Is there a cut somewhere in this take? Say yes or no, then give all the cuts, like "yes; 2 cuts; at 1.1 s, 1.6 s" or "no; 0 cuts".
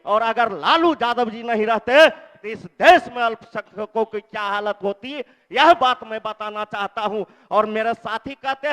no; 0 cuts